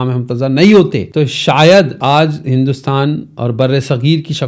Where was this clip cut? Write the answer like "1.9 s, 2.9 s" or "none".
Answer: 1.0 s, 1.9 s